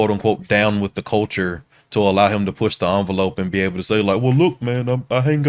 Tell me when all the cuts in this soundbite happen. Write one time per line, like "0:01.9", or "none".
none